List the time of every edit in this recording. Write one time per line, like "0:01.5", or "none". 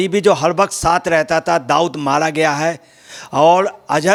none